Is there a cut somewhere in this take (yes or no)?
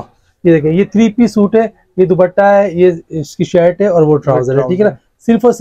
no